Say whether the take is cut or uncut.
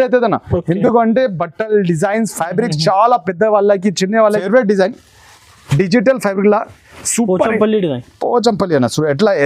cut